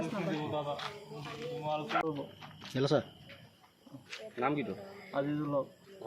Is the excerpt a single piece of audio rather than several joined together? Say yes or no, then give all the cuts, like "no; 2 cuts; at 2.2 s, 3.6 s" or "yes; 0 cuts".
no; 1 cut; at 2.0 s